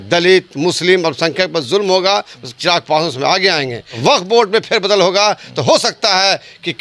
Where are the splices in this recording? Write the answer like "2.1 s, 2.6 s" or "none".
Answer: 4.0 s